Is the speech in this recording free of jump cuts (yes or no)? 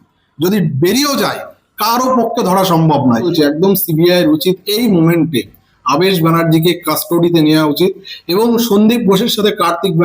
no